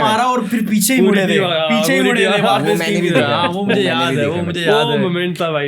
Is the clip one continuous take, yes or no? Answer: yes